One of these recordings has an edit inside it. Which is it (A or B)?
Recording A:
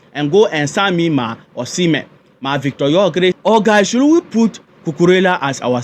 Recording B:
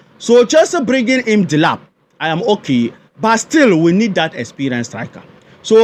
A